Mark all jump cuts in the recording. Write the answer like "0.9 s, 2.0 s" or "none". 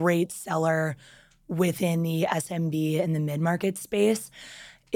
none